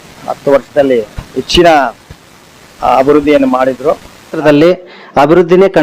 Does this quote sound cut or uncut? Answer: cut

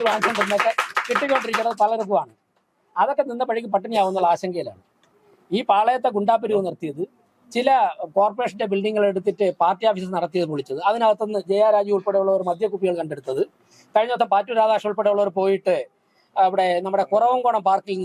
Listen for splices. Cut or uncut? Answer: uncut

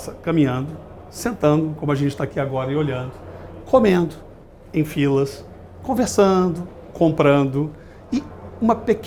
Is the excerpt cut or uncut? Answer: uncut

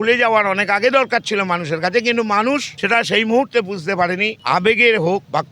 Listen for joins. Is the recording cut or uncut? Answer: uncut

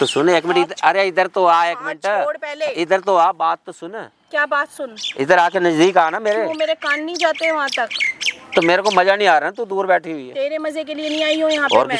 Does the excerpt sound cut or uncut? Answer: uncut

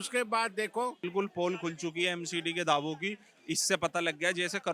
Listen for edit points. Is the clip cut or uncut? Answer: cut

